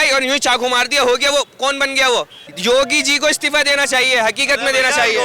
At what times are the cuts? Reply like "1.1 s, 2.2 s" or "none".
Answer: 2.4 s